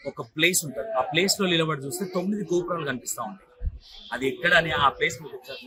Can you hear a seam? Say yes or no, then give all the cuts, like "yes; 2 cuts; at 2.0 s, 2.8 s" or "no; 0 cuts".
no; 0 cuts